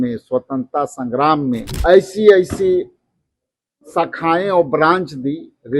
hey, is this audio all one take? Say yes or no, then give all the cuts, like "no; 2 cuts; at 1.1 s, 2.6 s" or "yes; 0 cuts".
no; 1 cut; at 1.7 s